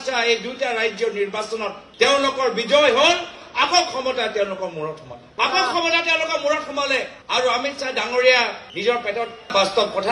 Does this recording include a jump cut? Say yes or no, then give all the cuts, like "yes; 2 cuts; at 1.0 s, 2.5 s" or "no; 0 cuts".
no; 0 cuts